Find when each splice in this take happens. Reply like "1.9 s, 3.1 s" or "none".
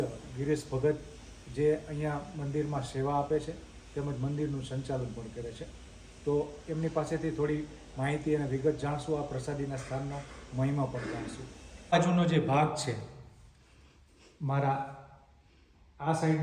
11.9 s